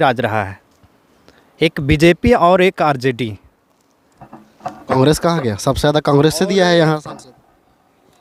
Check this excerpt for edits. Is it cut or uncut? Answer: uncut